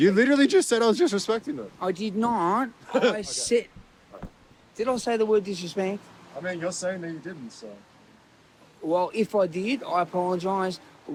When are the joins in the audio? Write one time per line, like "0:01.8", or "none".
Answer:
none